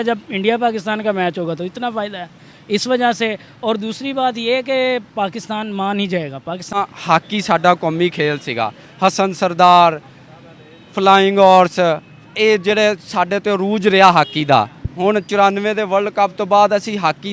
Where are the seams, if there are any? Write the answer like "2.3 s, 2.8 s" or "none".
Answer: 6.8 s

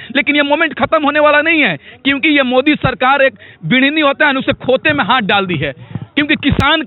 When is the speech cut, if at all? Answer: none

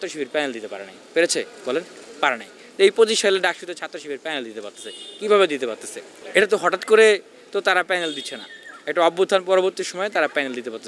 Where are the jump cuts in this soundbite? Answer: none

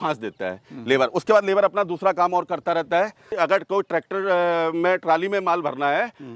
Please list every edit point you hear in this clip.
3.3 s

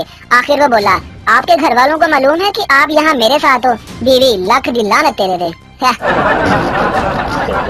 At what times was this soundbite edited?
none

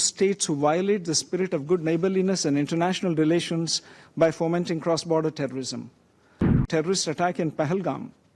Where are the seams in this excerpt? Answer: 6.7 s

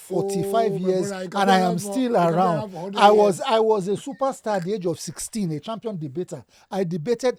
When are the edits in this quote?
none

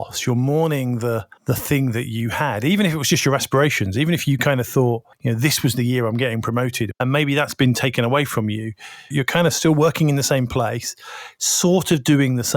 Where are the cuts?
1.3 s, 5.1 s, 6.9 s, 9.1 s

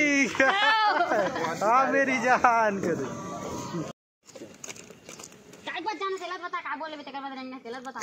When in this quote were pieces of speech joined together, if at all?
3.9 s

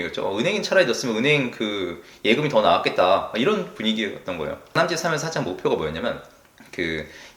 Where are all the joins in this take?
4.7 s

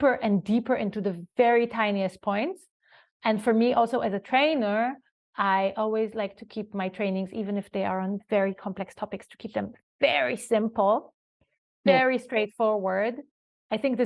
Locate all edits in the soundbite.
none

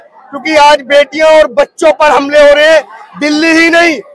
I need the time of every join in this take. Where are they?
none

